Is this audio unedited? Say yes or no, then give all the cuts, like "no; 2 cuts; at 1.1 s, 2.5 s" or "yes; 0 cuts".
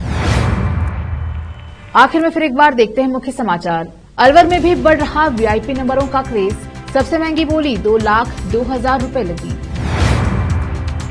yes; 0 cuts